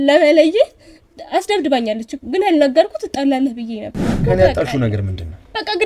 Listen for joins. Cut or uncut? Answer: cut